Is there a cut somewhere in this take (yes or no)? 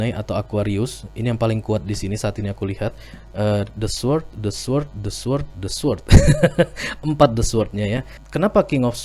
yes